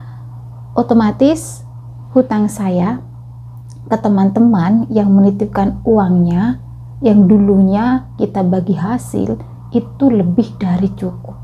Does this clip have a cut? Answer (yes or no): no